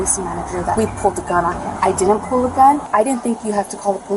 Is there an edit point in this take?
yes; 3 cuts; at 0.8 s, 1.7 s, 2.8 s

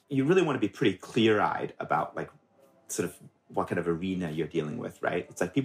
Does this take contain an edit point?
no; 0 cuts

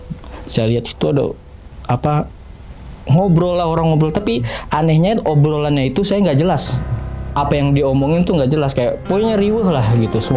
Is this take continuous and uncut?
yes; 0 cuts

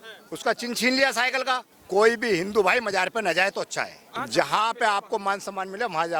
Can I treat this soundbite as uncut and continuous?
no; 2 cuts; at 1.7 s, 4.2 s

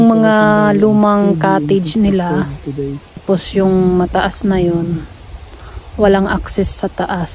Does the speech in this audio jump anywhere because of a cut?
yes; 1 cut; at 3.2 s

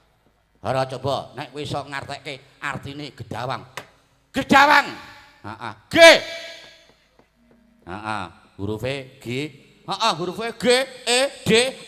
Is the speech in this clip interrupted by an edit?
no; 0 cuts

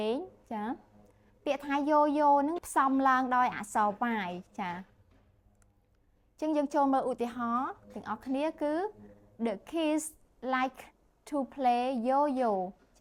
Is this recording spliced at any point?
no; 0 cuts

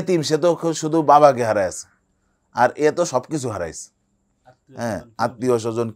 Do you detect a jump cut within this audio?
no; 0 cuts

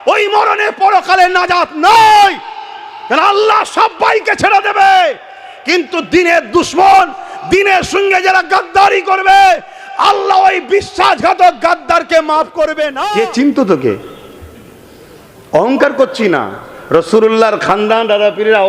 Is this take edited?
yes; 1 cut; at 12.9 s

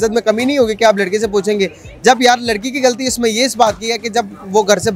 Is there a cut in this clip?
no; 0 cuts

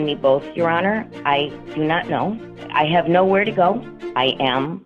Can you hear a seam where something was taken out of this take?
yes; 2 cuts; at 2.5 s, 4.0 s

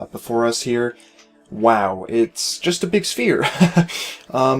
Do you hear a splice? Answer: yes; 1 cut; at 1.0 s

